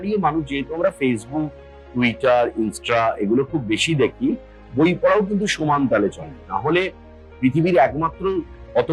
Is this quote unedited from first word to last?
yes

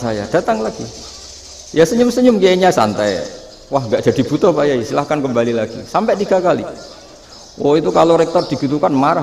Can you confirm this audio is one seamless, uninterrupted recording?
yes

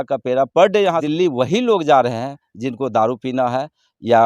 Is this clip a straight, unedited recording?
no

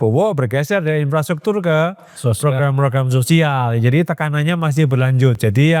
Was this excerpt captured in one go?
yes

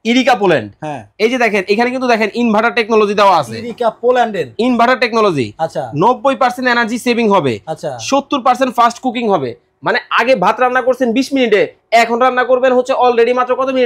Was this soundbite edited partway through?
no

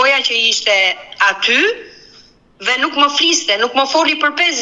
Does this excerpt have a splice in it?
no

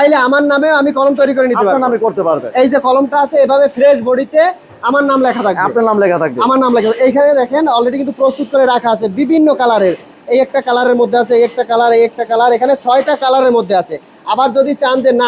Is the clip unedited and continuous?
yes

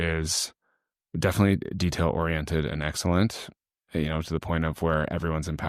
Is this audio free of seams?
yes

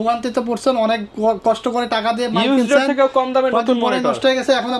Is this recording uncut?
yes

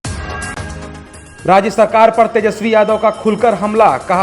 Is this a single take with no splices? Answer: no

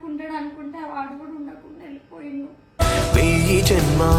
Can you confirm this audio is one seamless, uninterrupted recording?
yes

